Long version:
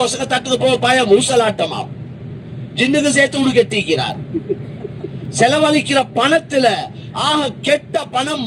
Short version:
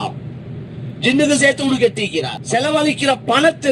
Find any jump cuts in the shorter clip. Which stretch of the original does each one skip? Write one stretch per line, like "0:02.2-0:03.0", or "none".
0:04.1-0:05.2